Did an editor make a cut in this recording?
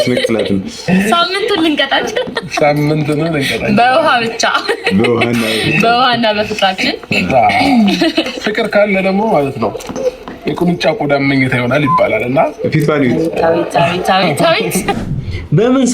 yes; 1 cut; at 14.9 s

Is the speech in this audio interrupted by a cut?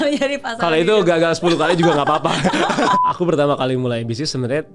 yes; 1 cut; at 3.0 s

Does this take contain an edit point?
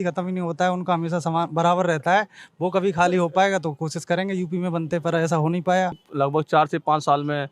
yes; 1 cut; at 6.1 s

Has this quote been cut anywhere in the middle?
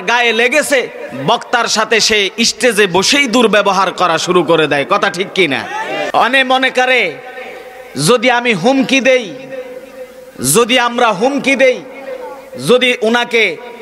yes; 1 cut; at 6.1 s

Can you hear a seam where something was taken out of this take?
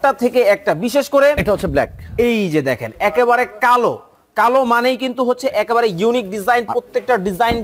no; 0 cuts

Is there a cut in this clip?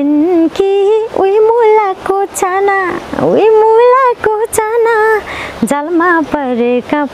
no; 0 cuts

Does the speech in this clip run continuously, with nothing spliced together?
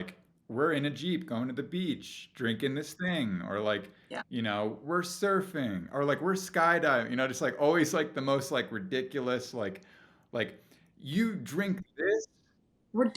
yes; 0 cuts

